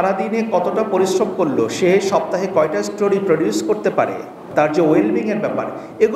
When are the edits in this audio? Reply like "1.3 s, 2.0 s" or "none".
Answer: 4.5 s